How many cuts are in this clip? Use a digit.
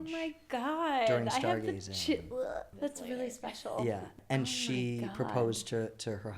2